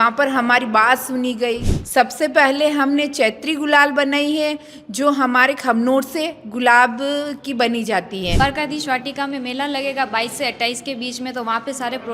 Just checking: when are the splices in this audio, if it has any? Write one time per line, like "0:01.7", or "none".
0:01.7
0:08.4